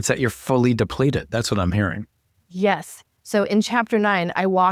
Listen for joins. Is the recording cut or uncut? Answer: uncut